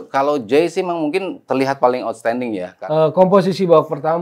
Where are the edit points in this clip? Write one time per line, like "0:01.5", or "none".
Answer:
0:02.7